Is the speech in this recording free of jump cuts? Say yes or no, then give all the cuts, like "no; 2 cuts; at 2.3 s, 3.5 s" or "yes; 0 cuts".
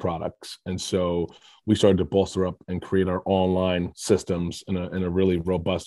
yes; 0 cuts